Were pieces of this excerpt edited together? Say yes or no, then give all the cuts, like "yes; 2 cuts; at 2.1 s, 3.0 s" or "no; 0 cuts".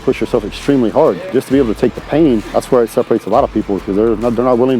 yes; 2 cuts; at 1.3 s, 2.5 s